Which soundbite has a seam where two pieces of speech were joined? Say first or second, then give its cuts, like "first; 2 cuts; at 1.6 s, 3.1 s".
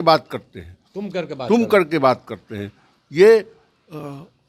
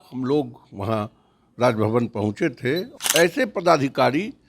second; 1 cut; at 2.9 s